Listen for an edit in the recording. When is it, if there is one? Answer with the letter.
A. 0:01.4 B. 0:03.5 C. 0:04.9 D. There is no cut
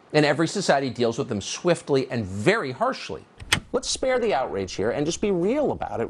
B